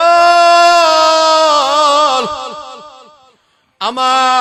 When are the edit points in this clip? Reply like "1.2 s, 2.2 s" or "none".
none